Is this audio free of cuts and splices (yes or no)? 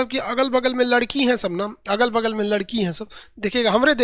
yes